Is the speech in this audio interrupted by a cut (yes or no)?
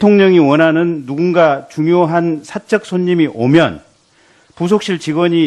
yes